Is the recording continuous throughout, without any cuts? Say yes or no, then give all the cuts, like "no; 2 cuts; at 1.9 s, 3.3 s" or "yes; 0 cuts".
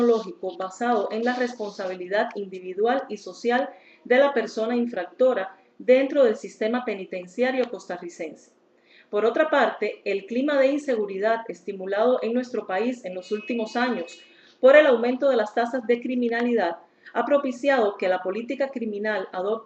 no; 1 cut; at 1.6 s